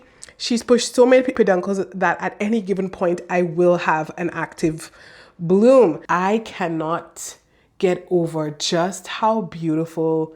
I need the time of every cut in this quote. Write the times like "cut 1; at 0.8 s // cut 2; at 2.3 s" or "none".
cut 1; at 1.3 s // cut 2; at 6.0 s